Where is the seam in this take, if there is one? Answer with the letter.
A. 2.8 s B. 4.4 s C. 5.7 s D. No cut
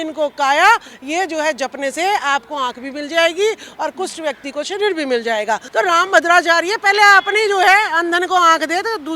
C